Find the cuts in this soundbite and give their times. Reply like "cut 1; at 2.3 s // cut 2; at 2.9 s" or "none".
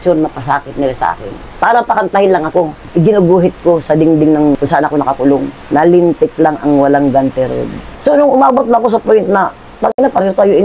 cut 1; at 1.5 s // cut 2; at 2.8 s // cut 3; at 7.9 s